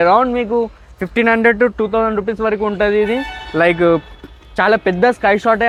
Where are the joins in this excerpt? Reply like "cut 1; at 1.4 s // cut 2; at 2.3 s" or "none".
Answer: none